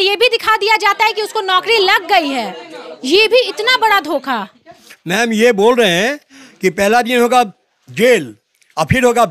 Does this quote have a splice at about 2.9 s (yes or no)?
no